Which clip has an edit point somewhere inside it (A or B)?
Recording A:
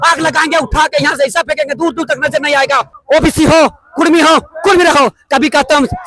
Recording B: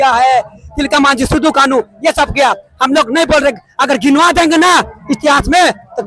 A